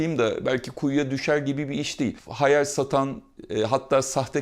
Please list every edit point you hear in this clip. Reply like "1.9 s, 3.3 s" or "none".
2.2 s